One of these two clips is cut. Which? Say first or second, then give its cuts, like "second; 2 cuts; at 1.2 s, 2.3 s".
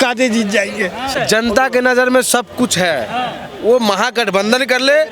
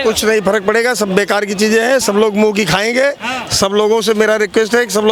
first; 1 cut; at 1.1 s